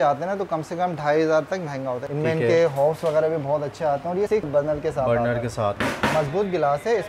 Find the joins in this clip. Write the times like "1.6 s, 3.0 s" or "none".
2.1 s, 4.4 s, 5.8 s